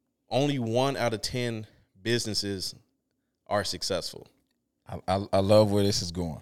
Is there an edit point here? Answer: no; 0 cuts

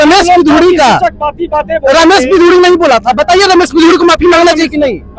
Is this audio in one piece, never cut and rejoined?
yes; 0 cuts

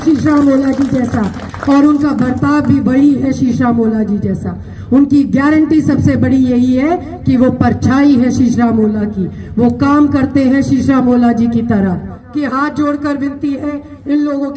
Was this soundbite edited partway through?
yes; 1 cut; at 12.2 s

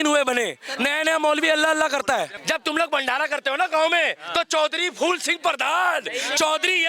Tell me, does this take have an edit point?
yes; 1 cut; at 2.4 s

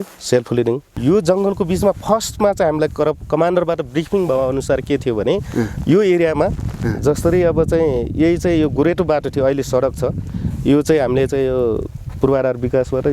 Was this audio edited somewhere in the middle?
yes; 1 cut; at 0.9 s

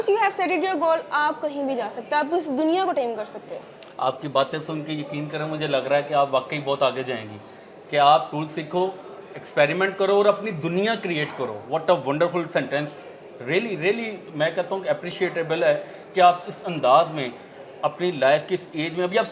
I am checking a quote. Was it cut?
no; 0 cuts

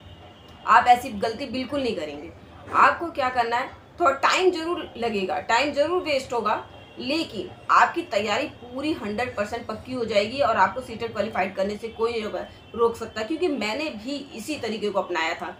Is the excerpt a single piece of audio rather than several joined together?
yes; 0 cuts

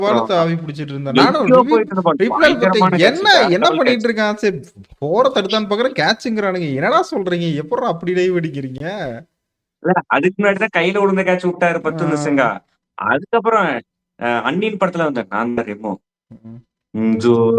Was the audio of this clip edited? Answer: no; 0 cuts

